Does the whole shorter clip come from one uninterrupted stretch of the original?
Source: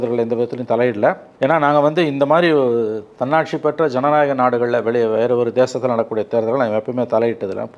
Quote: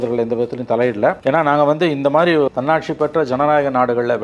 no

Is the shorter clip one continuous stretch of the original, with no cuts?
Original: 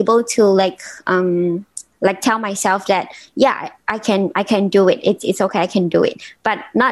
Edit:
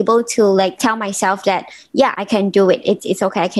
no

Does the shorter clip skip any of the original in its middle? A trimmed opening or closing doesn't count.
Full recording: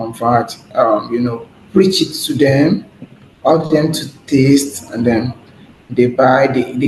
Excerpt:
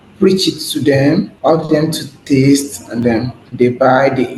yes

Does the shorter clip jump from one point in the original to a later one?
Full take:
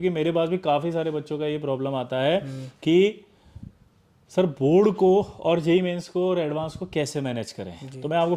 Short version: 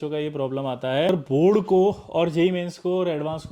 yes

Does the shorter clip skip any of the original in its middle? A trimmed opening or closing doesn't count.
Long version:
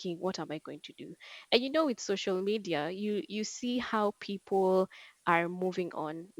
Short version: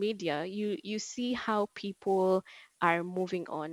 no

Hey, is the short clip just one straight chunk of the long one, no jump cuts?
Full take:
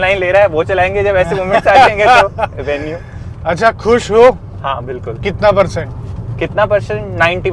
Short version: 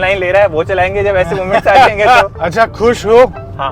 no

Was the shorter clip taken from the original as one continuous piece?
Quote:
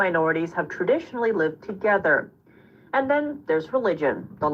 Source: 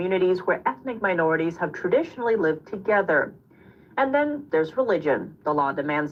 yes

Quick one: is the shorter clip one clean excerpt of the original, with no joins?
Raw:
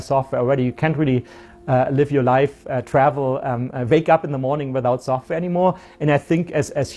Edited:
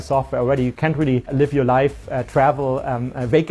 no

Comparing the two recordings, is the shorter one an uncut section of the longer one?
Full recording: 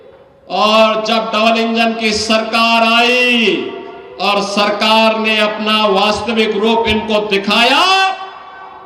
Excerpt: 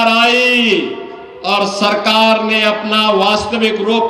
yes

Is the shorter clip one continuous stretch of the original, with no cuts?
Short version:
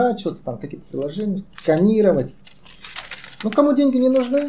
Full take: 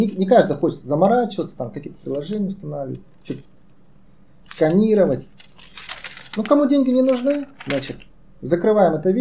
no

